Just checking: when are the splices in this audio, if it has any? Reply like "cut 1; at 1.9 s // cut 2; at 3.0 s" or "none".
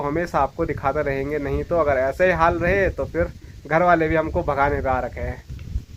none